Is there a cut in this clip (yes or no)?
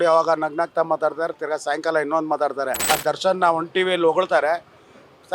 yes